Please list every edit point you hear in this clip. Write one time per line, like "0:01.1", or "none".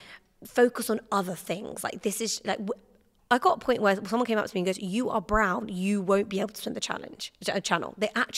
none